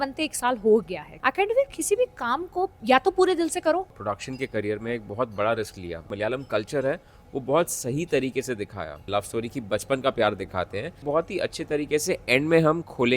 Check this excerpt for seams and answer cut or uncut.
cut